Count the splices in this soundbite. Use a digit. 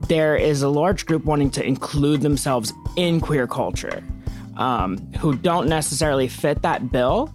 0